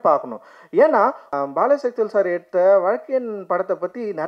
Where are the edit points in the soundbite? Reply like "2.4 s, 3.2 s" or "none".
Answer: 1.3 s